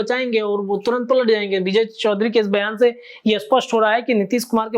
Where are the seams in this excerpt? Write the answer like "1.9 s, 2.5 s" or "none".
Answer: none